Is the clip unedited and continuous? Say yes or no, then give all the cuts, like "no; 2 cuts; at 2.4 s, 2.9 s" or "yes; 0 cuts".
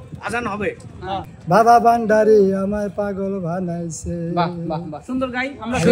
no; 1 cut; at 1.2 s